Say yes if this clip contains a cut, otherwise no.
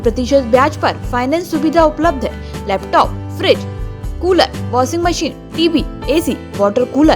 no